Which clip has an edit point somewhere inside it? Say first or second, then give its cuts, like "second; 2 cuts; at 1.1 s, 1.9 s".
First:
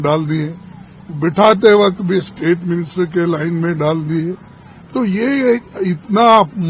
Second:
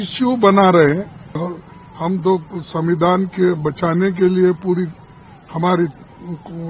second; 1 cut; at 1.4 s